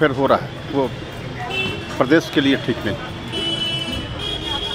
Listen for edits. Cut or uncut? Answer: uncut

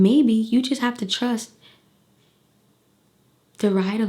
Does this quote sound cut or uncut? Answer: uncut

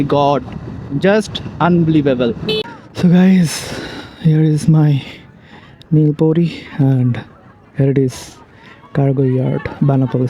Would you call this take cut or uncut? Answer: cut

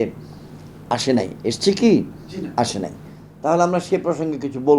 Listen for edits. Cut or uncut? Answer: uncut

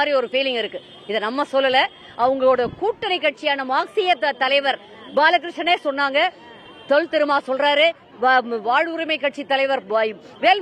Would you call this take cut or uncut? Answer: uncut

